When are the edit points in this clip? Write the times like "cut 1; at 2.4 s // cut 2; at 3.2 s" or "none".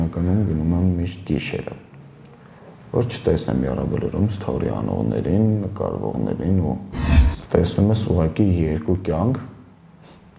cut 1; at 7.4 s